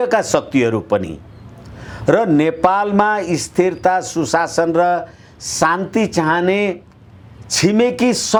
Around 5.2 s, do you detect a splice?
no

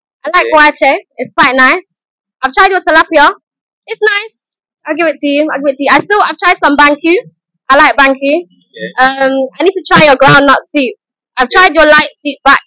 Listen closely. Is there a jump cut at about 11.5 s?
no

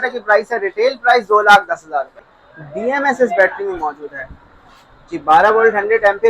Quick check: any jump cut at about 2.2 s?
yes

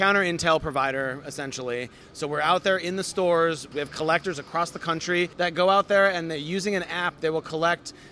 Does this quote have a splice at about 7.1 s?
no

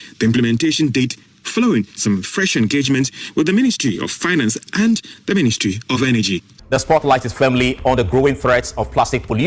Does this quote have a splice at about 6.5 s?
yes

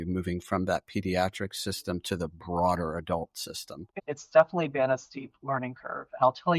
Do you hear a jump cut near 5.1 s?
no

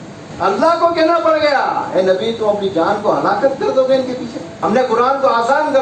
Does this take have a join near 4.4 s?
yes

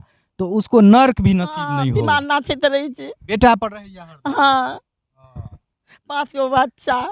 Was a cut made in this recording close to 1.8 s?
yes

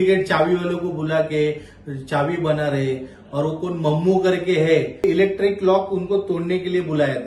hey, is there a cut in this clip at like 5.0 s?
yes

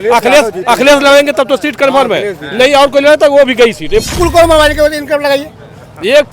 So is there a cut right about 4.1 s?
yes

